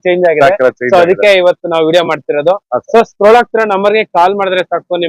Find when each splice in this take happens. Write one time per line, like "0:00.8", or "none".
none